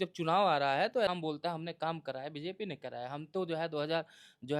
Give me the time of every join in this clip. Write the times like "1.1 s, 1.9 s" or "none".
1.1 s

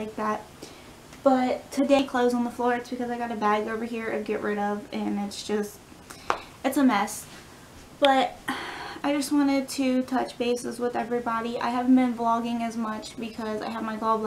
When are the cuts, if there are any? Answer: 2.0 s

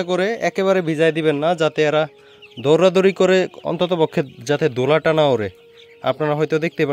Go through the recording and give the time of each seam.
none

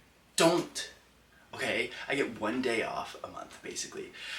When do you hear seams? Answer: none

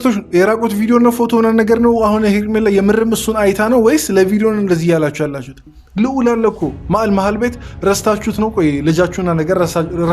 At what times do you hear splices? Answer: 5.8 s

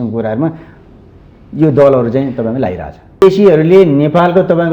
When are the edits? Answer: 3.2 s

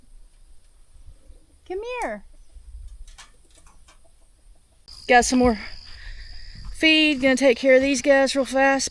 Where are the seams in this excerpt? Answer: 4.9 s

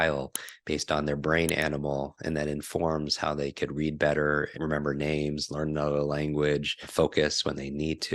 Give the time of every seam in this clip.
4.5 s, 6.8 s

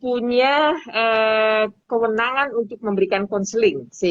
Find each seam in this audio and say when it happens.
none

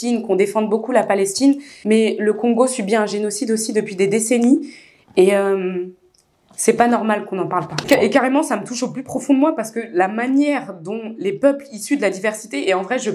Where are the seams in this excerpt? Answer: 7.8 s

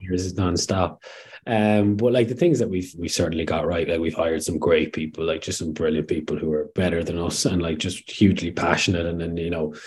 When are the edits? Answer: 6.7 s

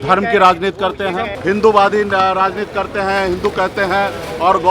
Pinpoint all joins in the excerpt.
1.4 s

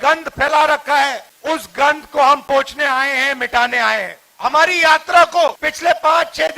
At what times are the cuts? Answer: 1.3 s, 4.2 s, 5.7 s

